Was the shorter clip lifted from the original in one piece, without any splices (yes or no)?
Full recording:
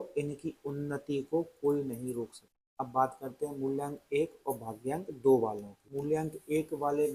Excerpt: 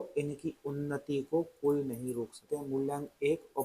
no